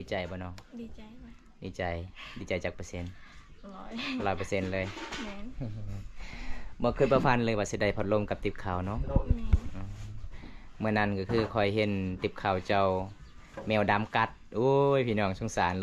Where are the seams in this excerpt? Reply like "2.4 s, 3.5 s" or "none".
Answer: none

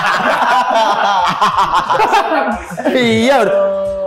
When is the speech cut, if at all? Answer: 2.0 s

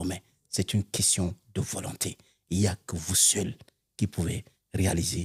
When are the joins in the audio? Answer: none

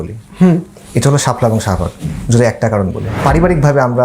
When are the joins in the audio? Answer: 3.1 s

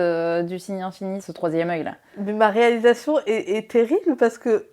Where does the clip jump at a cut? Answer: 1.2 s

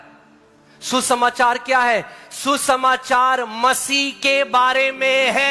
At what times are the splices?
none

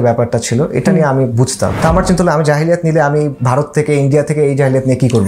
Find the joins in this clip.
1.8 s, 3.4 s

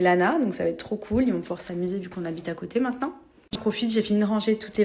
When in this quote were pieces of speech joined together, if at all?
3.6 s

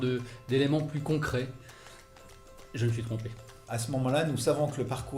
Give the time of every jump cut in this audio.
3.7 s

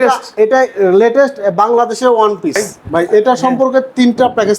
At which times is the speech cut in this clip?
2.8 s

